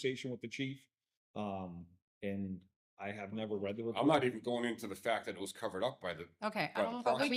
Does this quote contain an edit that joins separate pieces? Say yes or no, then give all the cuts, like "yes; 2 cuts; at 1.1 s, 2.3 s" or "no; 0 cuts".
no; 0 cuts